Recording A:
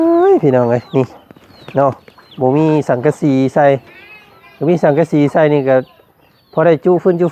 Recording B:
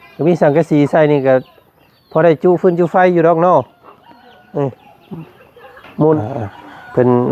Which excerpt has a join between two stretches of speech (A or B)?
B